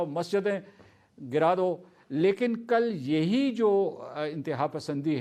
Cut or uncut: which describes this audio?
uncut